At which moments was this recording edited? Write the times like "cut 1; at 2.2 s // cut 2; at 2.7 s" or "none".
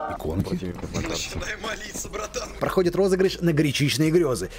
cut 1; at 2.6 s